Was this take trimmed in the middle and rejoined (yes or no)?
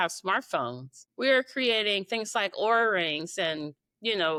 no